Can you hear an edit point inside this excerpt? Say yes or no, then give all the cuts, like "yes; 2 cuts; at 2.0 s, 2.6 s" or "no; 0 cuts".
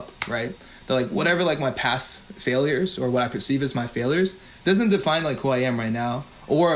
no; 0 cuts